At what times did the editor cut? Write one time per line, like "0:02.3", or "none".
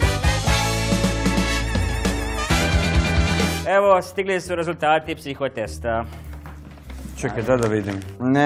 none